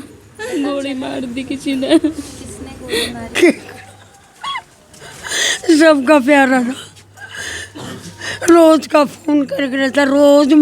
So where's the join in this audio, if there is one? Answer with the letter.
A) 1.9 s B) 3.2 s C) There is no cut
B